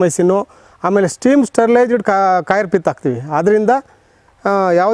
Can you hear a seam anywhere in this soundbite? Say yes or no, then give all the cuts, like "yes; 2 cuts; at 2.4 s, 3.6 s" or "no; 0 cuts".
no; 0 cuts